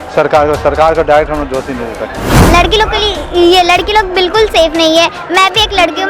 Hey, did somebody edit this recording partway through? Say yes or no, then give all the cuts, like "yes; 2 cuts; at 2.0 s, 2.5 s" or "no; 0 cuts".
yes; 1 cut; at 2.3 s